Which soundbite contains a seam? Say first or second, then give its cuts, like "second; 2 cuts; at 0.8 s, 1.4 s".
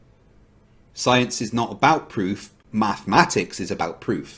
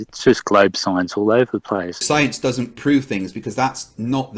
second; 1 cut; at 1.9 s